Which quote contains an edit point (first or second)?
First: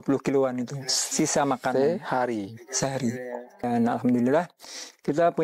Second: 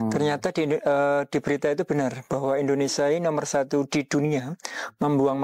first